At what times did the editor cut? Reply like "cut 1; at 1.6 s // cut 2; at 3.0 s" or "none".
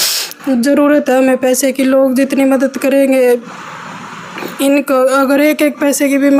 none